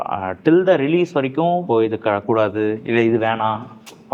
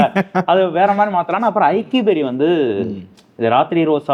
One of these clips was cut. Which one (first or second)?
first